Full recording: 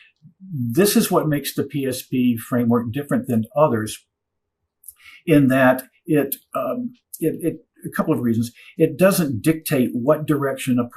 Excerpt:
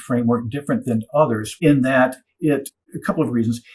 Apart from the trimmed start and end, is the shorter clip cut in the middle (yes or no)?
yes